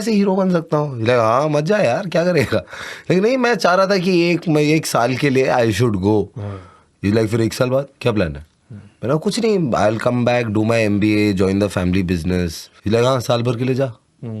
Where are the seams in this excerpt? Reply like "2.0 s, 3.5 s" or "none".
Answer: none